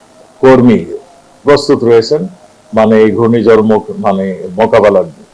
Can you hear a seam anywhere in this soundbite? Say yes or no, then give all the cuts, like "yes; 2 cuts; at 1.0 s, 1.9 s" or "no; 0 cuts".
no; 0 cuts